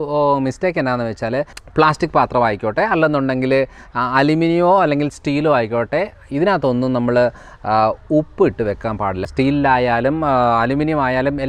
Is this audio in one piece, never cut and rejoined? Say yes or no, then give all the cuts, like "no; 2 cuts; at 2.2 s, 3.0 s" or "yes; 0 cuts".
no; 2 cuts; at 1.6 s, 9.2 s